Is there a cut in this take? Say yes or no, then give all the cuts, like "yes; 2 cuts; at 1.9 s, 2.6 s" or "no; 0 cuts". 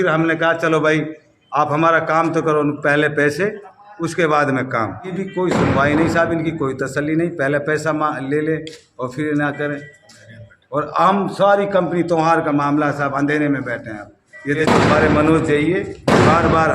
yes; 2 cuts; at 5.1 s, 14.6 s